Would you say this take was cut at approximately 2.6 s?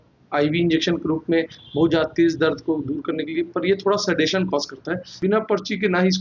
no; 1 cut; at 5.0 s

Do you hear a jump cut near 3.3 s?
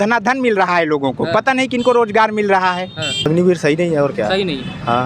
yes; 1 cut; at 3.3 s

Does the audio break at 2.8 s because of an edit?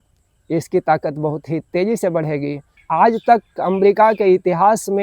yes; 1 cut; at 2.8 s

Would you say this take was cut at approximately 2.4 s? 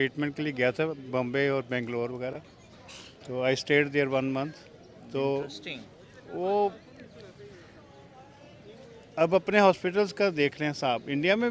no; 0 cuts

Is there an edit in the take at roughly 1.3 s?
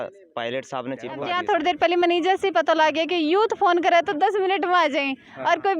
yes; 1 cut; at 1.3 s

